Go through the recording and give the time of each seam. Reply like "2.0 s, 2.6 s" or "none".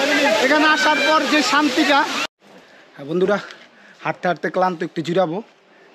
2.2 s